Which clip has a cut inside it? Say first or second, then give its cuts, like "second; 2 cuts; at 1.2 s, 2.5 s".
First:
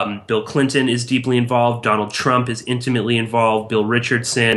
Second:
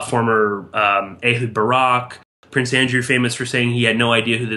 second; 1 cut; at 2.3 s